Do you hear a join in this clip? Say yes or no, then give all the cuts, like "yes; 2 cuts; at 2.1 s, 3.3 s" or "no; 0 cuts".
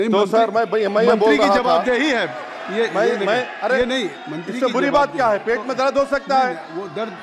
no; 0 cuts